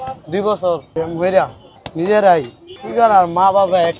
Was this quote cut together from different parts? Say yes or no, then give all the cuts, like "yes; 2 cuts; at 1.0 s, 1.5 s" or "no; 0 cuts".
yes; 2 cuts; at 0.9 s, 1.6 s